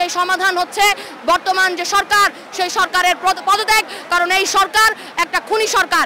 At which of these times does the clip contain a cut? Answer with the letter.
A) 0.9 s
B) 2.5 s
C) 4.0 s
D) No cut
D